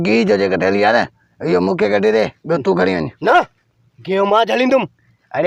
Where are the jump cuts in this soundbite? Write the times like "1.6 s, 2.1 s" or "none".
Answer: none